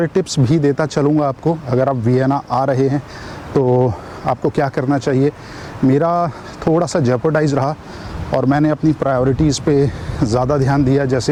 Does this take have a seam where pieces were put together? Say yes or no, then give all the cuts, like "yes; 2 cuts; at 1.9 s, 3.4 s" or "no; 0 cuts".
no; 0 cuts